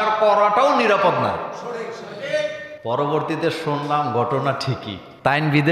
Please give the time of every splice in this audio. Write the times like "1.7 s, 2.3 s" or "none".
2.7 s